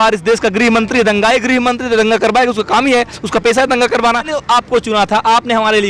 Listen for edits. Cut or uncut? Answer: cut